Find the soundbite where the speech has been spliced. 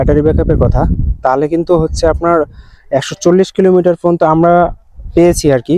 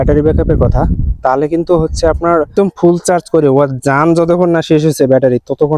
second; 1 cut; at 2.5 s

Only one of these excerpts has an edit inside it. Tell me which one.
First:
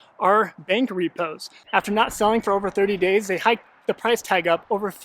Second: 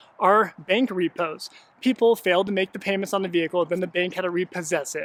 first; 1 cut; at 1.6 s

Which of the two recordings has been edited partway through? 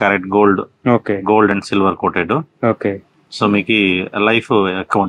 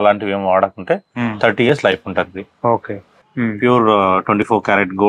second; 1 cut; at 3.3 s

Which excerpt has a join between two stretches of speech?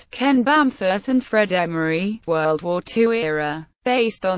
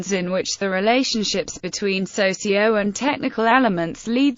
first; 1 cut; at 1.0 s

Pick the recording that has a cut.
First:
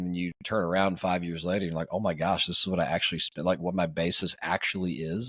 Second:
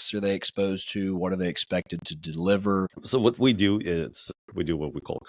second; 2 cuts; at 3.0 s, 4.3 s

